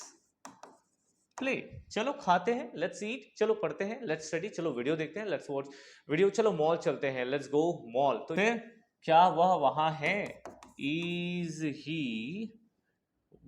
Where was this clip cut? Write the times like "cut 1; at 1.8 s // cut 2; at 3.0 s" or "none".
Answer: cut 1; at 8.3 s